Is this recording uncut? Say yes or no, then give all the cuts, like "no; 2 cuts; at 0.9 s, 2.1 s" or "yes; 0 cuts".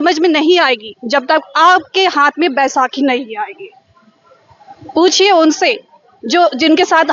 yes; 0 cuts